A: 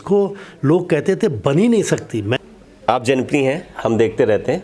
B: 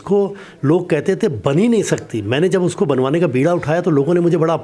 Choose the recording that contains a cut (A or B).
A